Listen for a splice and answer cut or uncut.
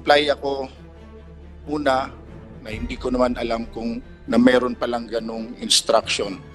uncut